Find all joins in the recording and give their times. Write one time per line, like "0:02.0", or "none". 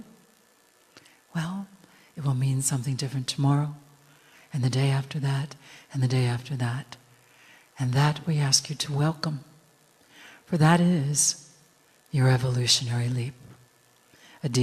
0:10.6